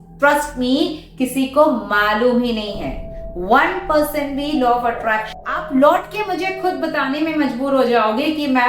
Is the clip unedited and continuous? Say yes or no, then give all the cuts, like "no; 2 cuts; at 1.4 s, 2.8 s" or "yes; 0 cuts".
no; 1 cut; at 5.3 s